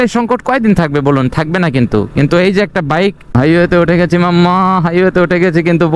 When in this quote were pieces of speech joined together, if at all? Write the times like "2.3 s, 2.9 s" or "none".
3.3 s